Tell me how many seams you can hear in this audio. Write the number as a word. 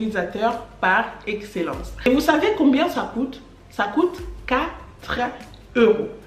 one